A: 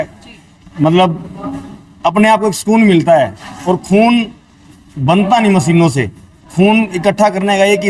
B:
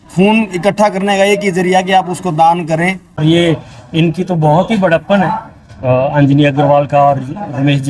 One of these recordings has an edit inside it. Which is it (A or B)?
B